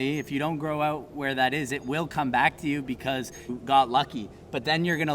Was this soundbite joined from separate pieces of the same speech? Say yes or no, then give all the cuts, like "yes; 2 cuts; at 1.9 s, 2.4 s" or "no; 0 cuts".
yes; 1 cut; at 3.5 s